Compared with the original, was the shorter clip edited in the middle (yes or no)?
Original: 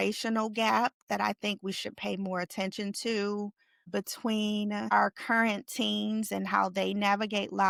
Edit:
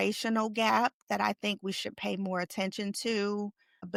no